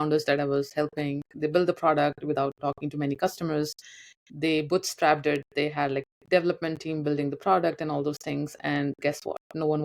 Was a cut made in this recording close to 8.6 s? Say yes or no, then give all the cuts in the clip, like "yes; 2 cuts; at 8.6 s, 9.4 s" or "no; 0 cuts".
no; 2 cuts; at 1.3 s, 2.6 s